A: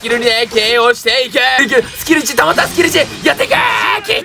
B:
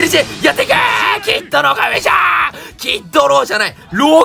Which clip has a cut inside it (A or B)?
A